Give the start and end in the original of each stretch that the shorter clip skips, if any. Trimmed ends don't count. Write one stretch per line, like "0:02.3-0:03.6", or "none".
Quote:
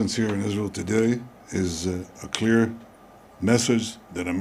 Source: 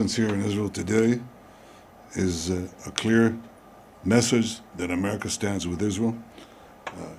0:01.4-0:02.0